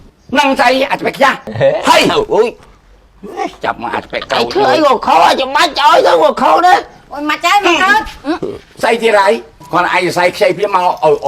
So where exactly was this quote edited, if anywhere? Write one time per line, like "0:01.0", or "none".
0:01.5
0:07.1